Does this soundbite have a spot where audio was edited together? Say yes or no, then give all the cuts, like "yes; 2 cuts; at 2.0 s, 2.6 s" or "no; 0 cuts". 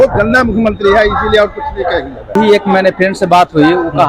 yes; 1 cut; at 2.3 s